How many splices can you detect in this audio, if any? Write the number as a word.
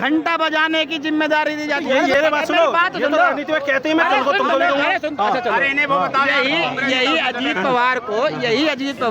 one